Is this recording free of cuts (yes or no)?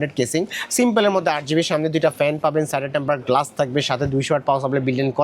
yes